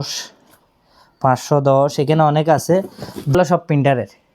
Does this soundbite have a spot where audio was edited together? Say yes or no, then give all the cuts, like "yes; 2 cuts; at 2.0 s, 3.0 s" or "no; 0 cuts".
yes; 1 cut; at 3.3 s